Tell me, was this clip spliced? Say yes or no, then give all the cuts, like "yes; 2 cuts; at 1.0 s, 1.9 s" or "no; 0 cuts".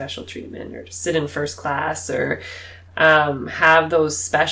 no; 0 cuts